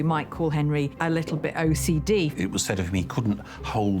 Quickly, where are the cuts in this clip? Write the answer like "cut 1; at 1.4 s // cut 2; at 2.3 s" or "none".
cut 1; at 2.3 s